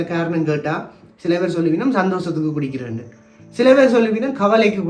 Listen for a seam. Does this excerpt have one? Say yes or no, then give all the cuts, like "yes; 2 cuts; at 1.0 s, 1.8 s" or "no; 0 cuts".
no; 0 cuts